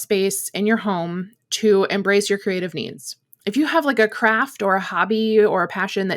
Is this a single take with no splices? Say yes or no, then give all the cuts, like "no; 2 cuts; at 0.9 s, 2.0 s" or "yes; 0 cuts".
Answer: yes; 0 cuts